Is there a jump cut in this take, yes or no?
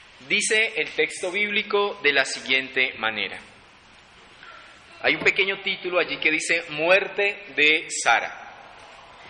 yes